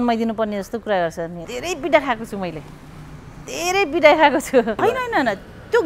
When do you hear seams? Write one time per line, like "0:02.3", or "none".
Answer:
0:01.5
0:04.7

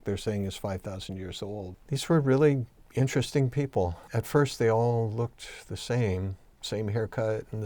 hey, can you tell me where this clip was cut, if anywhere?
0:01.8
0:04.1
0:06.5

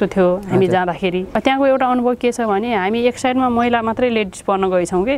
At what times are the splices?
0:01.3

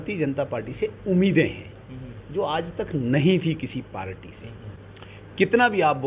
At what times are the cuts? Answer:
0:04.8

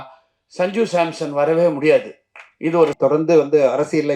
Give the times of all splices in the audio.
0:02.9

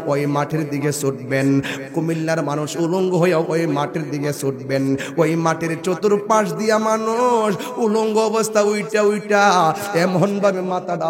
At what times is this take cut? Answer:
none

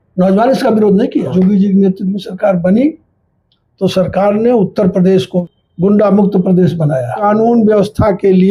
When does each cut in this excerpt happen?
0:01.3
0:05.4
0:07.2

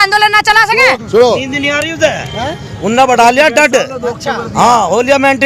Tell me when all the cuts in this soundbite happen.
0:01.0

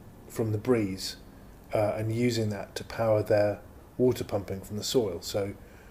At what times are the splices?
none

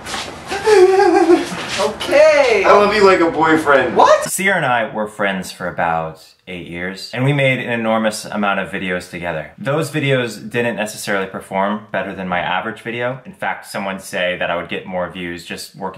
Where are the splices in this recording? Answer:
0:04.3

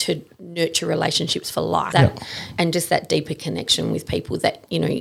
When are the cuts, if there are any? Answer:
0:01.9

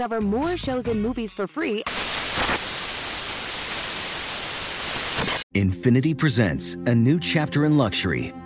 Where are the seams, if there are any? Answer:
0:05.5

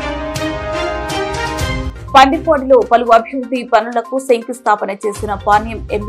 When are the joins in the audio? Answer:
0:01.9

